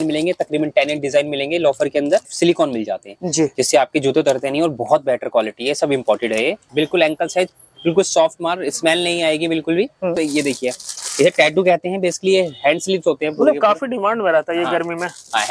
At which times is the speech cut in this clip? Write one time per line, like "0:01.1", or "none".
0:02.3
0:06.6
0:10.2